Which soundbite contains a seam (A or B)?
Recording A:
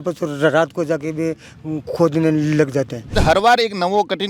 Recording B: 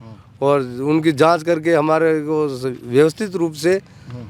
A